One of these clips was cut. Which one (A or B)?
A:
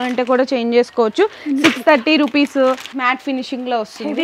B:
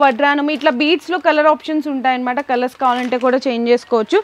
A